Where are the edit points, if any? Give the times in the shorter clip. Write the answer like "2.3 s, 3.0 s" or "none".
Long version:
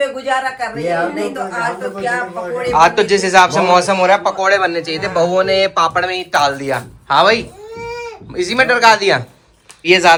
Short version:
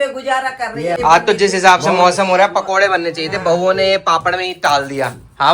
1.0 s